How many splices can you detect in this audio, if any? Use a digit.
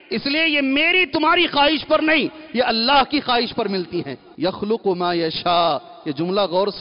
1